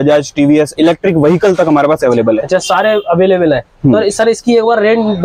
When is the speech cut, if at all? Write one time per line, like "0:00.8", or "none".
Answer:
none